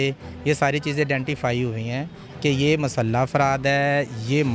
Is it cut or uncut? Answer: uncut